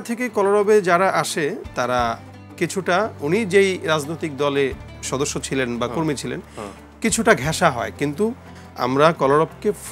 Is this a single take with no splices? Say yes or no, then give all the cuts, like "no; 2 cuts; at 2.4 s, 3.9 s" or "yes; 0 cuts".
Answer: yes; 0 cuts